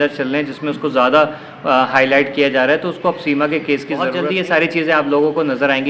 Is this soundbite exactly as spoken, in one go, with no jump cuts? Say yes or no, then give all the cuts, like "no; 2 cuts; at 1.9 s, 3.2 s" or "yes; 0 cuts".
no; 1 cut; at 4.2 s